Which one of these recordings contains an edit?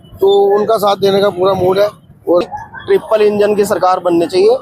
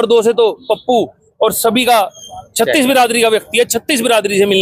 first; 1 cut; at 2.4 s

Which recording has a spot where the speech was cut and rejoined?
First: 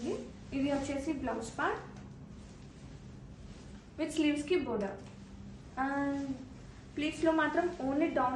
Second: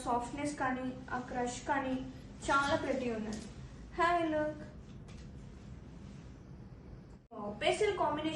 second; 1 cut; at 7.3 s

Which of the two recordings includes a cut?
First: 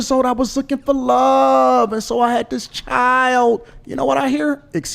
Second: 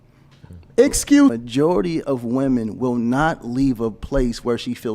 second; 1 cut; at 1.3 s

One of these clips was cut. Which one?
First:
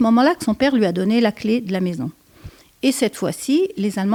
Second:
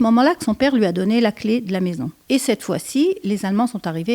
second; 1 cut; at 2.1 s

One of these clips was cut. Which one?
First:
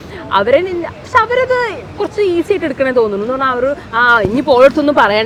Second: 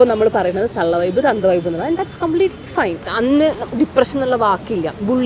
second; 1 cut; at 3.0 s

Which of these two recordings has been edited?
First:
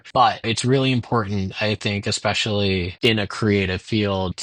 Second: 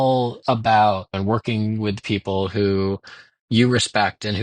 second; 1 cut; at 1.1 s

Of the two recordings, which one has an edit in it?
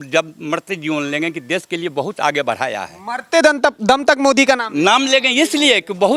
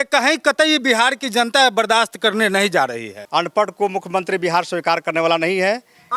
second; 1 cut; at 3.1 s

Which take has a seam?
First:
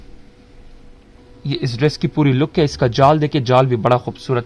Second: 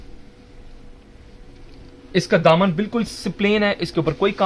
first; 1 cut; at 1.3 s

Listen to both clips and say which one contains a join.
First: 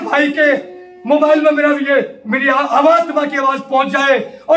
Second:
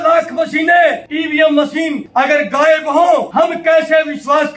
second; 3 cuts; at 1.1 s, 2.0 s, 3.3 s

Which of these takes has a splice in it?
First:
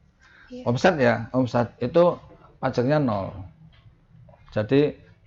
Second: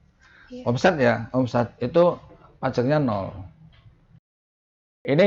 second; 1 cut; at 4.4 s

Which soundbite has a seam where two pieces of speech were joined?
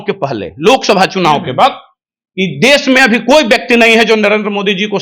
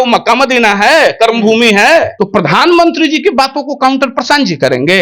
second; 1 cut; at 2.1 s

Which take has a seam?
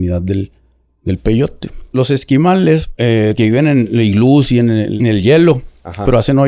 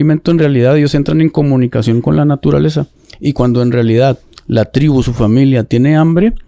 first; 3 cuts; at 1.9 s, 2.9 s, 4.9 s

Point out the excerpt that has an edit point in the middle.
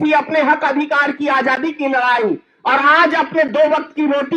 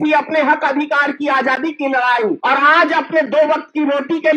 second; 1 cut; at 2.4 s

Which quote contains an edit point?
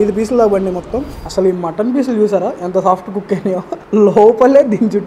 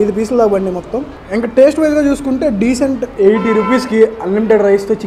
first; 1 cut; at 1.1 s

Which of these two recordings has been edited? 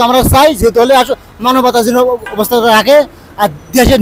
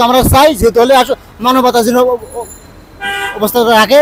first; 1 cut; at 2.3 s

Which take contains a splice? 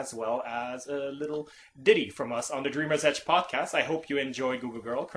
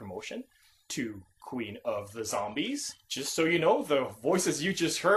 first; 1 cut; at 2.9 s

